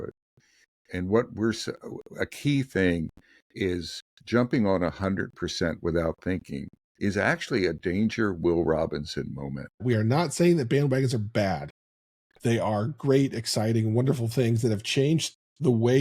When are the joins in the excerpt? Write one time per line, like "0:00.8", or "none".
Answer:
0:09.8